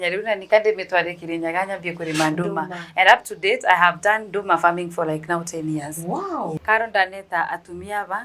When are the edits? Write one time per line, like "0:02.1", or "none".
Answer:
0:06.6